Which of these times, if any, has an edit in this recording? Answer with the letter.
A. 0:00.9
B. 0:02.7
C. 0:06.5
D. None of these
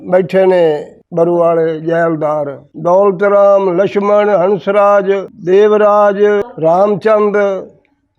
C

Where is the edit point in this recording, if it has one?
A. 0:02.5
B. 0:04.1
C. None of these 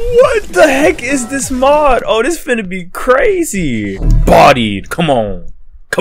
B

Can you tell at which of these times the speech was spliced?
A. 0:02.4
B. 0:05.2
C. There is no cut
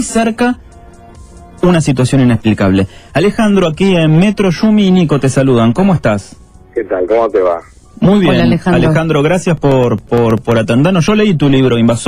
B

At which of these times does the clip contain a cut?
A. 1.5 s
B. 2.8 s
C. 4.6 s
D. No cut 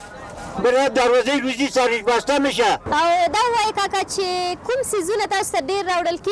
B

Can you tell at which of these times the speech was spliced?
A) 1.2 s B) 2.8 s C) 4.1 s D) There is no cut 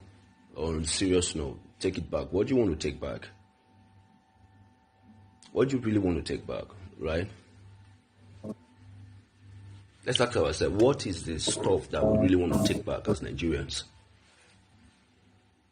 A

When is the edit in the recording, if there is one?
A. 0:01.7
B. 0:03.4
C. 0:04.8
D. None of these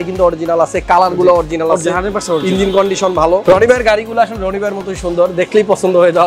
B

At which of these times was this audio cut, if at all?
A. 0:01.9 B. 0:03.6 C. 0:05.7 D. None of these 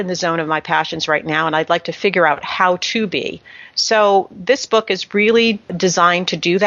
C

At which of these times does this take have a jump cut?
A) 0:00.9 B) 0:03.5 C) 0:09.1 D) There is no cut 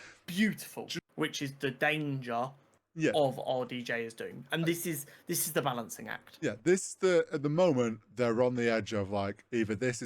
A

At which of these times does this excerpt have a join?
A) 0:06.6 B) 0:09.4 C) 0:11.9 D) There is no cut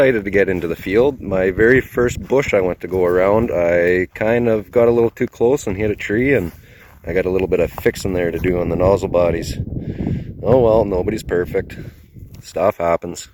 D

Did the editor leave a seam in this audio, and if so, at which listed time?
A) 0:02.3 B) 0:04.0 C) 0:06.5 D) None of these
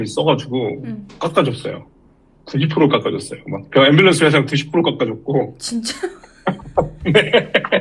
D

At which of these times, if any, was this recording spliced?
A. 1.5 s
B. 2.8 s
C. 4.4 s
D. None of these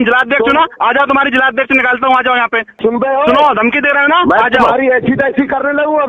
B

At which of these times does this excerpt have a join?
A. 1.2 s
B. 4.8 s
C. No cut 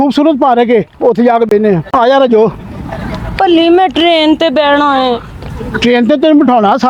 C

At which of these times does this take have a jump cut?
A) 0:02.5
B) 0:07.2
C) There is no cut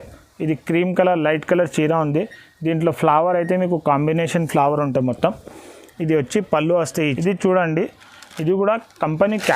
B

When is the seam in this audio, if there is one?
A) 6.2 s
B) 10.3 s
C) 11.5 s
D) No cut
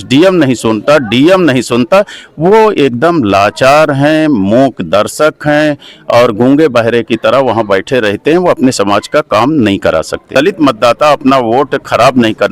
B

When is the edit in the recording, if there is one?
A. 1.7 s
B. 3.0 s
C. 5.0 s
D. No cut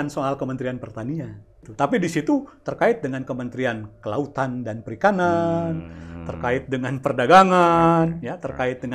A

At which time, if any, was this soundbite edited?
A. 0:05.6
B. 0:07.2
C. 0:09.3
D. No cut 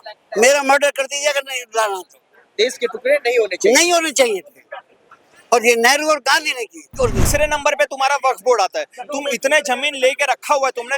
B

